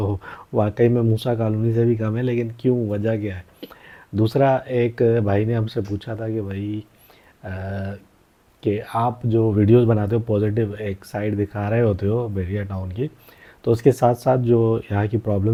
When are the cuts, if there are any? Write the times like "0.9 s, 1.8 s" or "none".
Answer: none